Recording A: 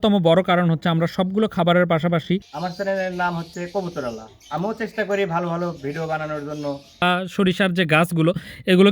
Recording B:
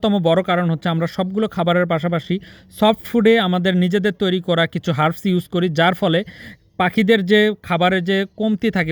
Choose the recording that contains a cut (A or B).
A